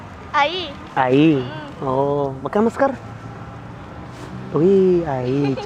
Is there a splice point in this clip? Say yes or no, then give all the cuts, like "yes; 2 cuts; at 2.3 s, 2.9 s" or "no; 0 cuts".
no; 0 cuts